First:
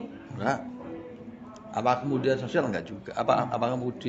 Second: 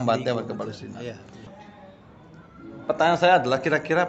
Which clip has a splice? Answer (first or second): second